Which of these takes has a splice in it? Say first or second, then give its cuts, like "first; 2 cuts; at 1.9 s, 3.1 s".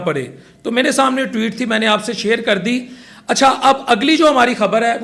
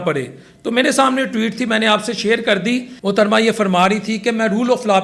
second; 1 cut; at 2.9 s